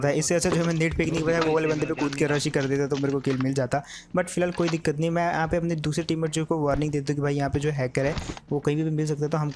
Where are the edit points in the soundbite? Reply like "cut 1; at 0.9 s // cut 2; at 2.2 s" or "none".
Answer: none

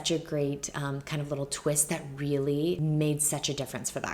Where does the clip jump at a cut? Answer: cut 1; at 2.8 s

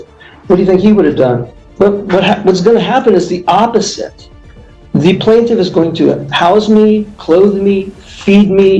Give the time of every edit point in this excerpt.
cut 1; at 1.6 s

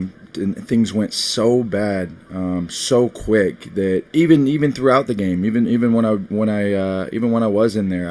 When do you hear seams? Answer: cut 1; at 4.1 s

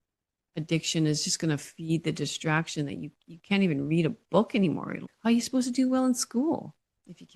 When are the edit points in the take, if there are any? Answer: cut 1; at 5.0 s

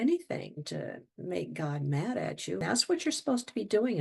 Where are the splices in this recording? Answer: cut 1; at 2.6 s

